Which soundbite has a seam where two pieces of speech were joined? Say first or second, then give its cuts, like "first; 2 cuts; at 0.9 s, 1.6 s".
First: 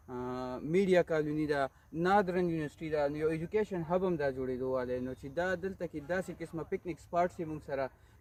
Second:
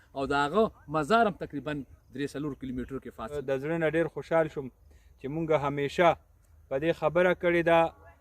second; 1 cut; at 3.4 s